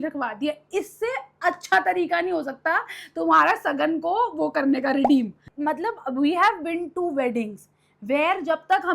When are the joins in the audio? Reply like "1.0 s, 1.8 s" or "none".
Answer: 5.4 s